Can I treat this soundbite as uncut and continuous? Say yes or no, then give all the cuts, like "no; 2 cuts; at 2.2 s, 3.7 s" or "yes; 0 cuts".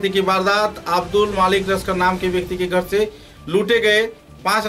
yes; 0 cuts